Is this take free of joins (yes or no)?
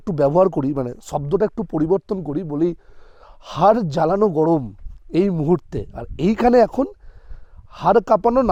yes